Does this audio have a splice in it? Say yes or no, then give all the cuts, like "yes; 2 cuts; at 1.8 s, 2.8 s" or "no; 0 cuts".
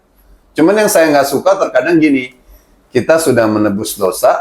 no; 0 cuts